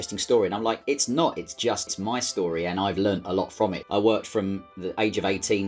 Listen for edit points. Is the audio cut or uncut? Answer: cut